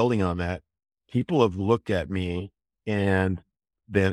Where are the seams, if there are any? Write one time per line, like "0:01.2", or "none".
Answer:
none